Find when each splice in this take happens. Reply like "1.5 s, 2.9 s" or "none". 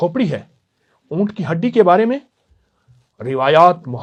none